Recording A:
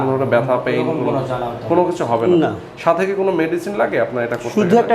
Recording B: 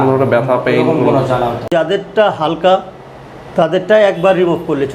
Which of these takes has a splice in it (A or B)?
B